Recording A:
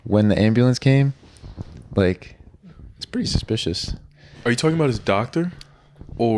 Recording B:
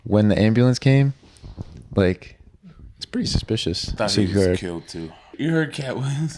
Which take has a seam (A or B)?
B